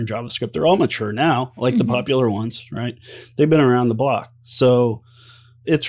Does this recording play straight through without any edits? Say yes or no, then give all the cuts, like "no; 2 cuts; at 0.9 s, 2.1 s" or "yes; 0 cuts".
yes; 0 cuts